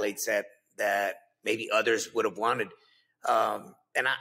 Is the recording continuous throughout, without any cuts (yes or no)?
yes